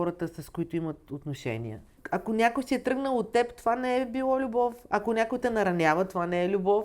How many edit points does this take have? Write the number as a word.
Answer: one